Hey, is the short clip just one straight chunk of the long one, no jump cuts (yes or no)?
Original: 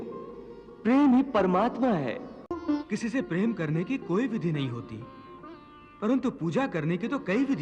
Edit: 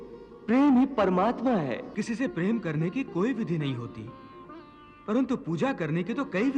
no